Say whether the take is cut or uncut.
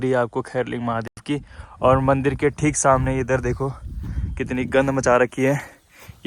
uncut